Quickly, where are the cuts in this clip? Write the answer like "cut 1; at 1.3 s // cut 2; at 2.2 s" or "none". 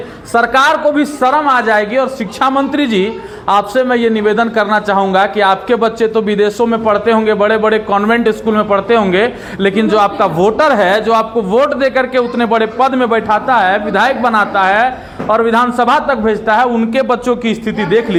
none